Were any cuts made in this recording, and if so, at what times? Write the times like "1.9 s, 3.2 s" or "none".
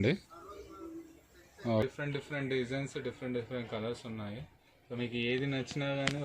1.8 s

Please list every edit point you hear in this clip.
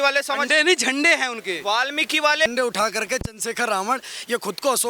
2.5 s

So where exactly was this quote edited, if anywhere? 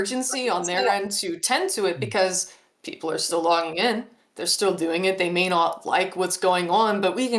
none

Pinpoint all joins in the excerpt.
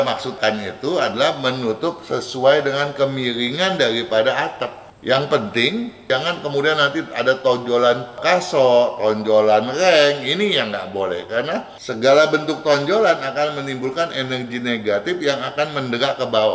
4.9 s, 6.0 s, 8.1 s, 11.8 s

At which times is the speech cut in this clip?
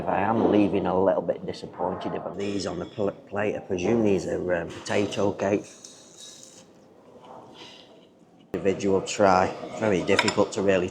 2.4 s, 8.6 s

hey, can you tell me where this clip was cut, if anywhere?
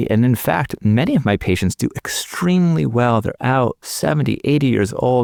none

